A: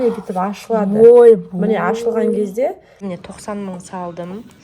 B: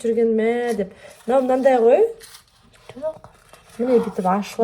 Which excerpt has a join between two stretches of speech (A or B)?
A